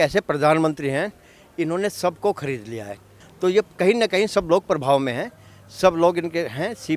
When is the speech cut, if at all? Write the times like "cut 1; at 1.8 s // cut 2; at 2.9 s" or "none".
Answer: none

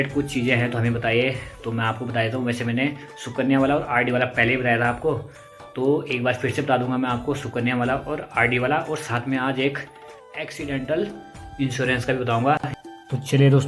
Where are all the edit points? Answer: none

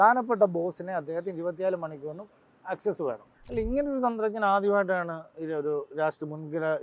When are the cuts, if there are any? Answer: cut 1; at 3.3 s

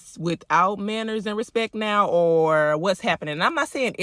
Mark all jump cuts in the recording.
none

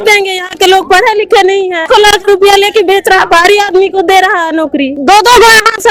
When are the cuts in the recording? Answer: cut 1; at 1.9 s // cut 2; at 4.9 s

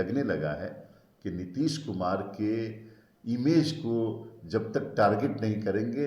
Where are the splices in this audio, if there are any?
none

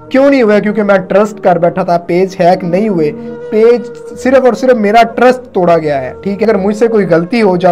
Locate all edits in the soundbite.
cut 1; at 6.4 s

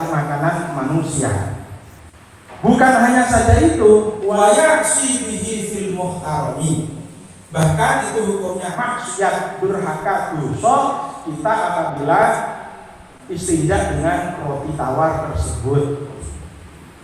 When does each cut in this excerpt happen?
none

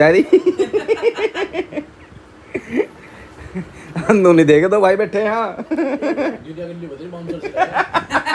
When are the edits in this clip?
none

